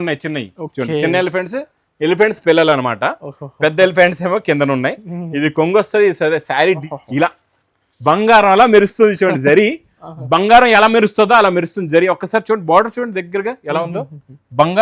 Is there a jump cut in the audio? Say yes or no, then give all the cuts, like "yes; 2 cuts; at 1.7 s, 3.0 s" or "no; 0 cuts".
yes; 1 cut; at 6.9 s